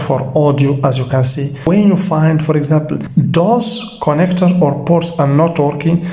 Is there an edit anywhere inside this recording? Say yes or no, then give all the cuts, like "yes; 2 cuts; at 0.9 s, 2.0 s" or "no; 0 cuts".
yes; 2 cuts; at 1.7 s, 3.0 s